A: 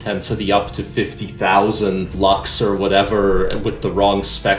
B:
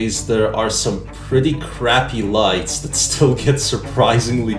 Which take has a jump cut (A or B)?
A